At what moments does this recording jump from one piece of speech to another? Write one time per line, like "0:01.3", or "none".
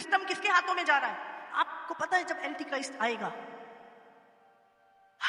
0:01.3